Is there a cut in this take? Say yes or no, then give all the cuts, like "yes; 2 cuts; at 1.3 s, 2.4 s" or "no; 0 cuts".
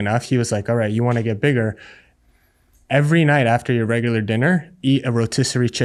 no; 0 cuts